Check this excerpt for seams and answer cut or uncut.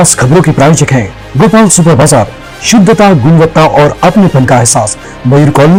uncut